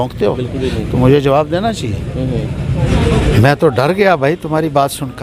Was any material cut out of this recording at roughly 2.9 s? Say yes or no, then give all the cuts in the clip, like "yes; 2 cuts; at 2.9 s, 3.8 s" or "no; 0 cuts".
yes; 1 cut; at 2.9 s